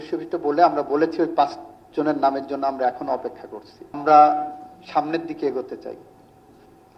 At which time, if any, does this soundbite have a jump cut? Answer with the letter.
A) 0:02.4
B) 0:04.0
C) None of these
B